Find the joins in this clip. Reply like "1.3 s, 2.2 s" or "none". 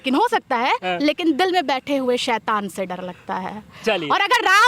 none